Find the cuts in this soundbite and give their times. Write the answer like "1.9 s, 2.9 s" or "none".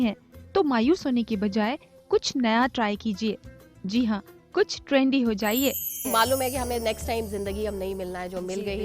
6.1 s